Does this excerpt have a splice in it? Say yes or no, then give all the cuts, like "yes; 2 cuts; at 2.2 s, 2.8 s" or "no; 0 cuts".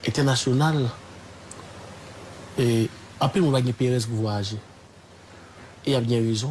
no; 0 cuts